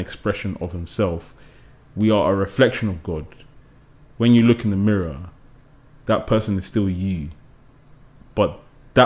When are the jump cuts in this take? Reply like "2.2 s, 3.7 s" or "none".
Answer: none